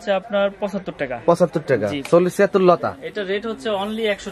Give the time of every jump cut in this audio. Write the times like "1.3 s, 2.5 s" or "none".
2.0 s